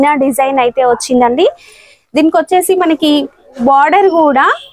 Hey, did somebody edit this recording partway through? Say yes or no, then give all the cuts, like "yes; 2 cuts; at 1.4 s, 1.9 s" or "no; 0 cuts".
no; 0 cuts